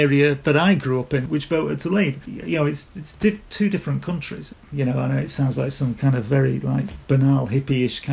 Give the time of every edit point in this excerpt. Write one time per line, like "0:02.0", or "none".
0:01.2
0:04.6